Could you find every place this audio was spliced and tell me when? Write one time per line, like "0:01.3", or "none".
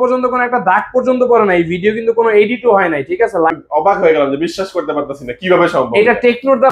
0:03.5